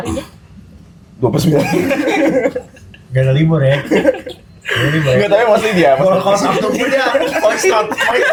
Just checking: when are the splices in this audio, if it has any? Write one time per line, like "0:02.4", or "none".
none

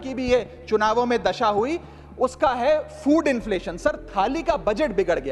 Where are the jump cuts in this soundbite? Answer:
none

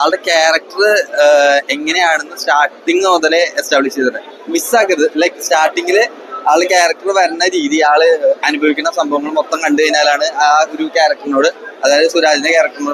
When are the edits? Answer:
none

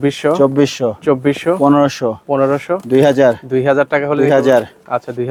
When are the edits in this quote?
none

